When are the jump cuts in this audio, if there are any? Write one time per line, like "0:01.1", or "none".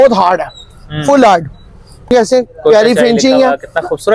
0:02.1